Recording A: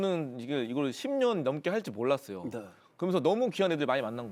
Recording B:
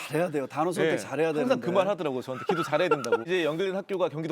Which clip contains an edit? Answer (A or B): B